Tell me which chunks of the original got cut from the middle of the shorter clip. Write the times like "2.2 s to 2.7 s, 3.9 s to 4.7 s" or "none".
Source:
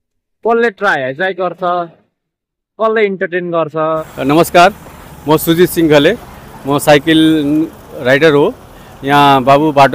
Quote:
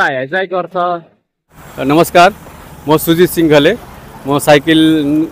2.6 s to 4.1 s